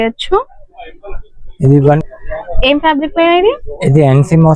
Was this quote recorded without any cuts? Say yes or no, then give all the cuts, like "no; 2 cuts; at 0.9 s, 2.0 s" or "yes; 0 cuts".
no; 1 cut; at 2.0 s